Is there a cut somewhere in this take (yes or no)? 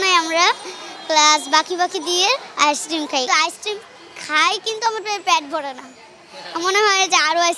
yes